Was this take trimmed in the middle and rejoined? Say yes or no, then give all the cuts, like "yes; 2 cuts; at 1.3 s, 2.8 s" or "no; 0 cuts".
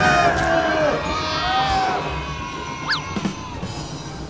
no; 0 cuts